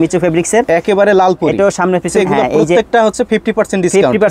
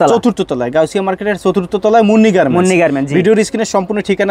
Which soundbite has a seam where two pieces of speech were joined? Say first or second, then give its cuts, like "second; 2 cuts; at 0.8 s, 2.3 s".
first; 1 cut; at 2.1 s